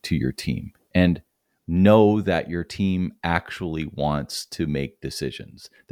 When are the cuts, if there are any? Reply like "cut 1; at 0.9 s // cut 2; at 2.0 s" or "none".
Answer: none